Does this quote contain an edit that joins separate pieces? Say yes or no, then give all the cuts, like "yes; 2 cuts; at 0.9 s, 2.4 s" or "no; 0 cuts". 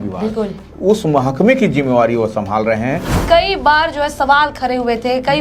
yes; 1 cut; at 3.2 s